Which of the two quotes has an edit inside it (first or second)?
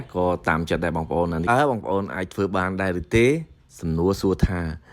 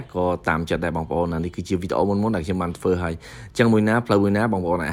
first